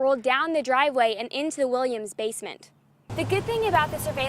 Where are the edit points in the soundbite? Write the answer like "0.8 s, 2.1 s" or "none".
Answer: 3.0 s